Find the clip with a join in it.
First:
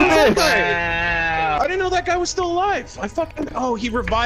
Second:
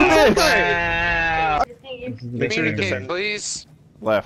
second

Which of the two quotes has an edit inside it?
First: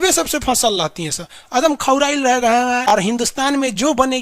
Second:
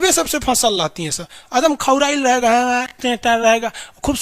first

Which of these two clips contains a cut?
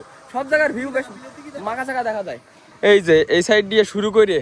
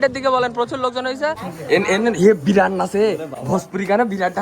second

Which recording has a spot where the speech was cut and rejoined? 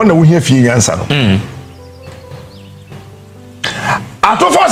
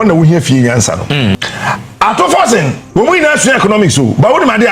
second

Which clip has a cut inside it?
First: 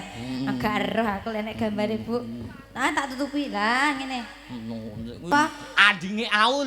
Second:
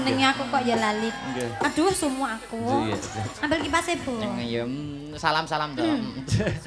first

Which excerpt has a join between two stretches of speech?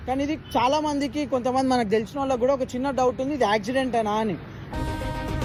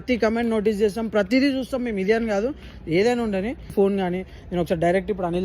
second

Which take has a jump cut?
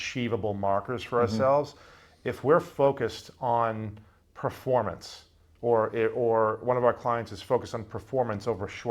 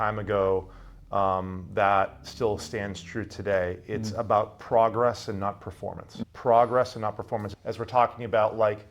second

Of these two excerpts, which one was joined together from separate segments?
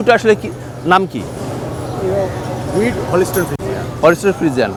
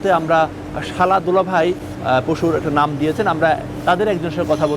second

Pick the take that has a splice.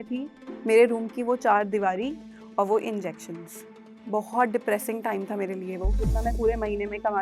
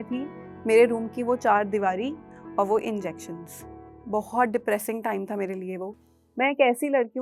first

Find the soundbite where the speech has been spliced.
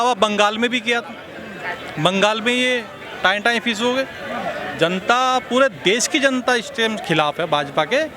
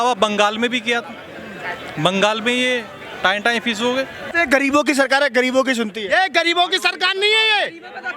second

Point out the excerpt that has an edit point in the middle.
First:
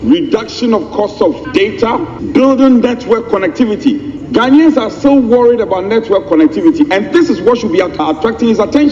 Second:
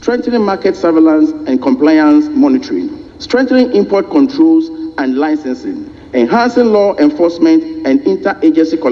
first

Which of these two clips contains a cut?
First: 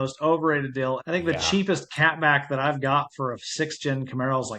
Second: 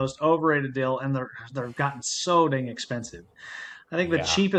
first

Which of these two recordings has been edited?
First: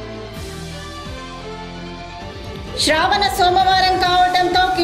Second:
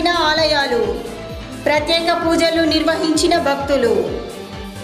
first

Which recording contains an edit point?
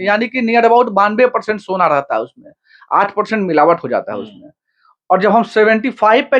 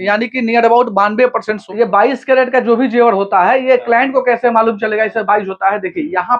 second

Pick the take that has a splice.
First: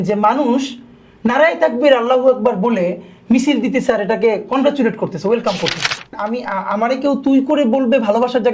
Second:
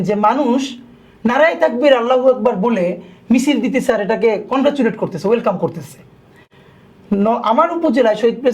first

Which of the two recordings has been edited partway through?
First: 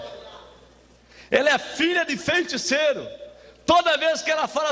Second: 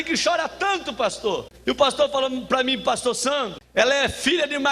second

